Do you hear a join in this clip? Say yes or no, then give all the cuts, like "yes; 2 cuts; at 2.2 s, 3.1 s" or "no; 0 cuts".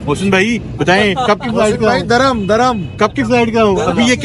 no; 0 cuts